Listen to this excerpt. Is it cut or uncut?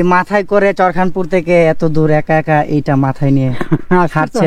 uncut